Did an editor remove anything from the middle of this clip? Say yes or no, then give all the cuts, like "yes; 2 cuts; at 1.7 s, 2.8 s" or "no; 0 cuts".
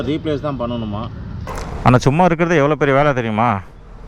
yes; 1 cut; at 1.5 s